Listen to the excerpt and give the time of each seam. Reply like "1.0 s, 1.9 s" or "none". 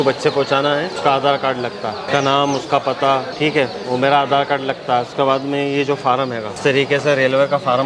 1.0 s, 2.1 s, 3.3 s, 6.5 s